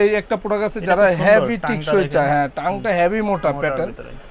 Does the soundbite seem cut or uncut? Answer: uncut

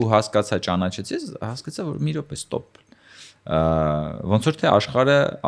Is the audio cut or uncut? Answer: uncut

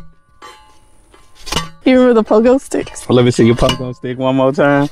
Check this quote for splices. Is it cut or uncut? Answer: cut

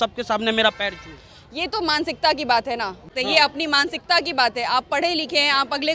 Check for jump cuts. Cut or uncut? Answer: cut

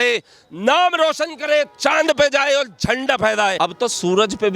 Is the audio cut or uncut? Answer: cut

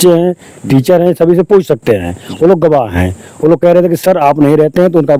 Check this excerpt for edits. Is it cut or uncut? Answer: uncut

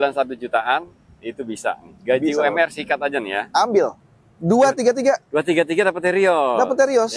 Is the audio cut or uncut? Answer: cut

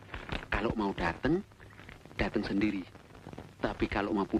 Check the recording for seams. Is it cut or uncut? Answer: uncut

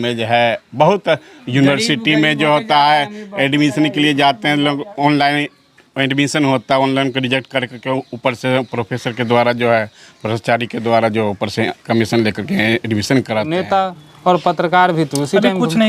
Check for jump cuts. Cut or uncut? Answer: cut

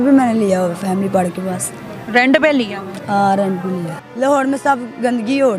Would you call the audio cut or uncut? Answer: cut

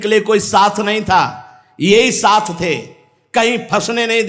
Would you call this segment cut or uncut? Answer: uncut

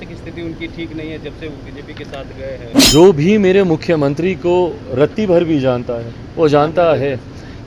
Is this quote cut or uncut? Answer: cut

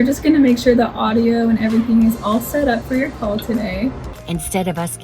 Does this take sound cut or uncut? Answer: cut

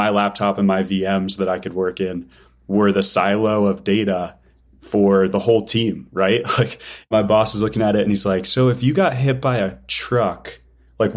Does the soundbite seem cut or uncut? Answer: uncut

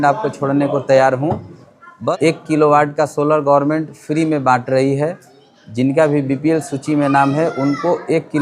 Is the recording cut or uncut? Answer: cut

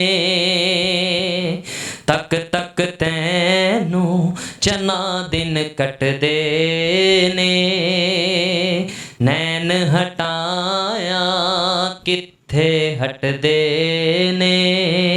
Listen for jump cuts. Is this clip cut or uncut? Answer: uncut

